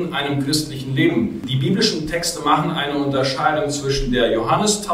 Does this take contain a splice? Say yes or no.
yes